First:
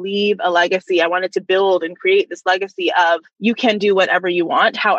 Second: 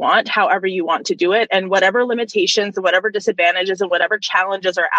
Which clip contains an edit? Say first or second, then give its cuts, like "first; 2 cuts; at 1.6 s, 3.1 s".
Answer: first; 1 cut; at 3.3 s